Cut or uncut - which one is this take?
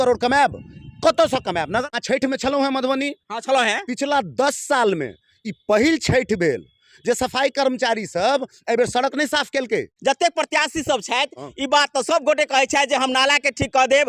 cut